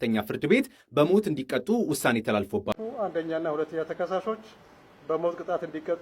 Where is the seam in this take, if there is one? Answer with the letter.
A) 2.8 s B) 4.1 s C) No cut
A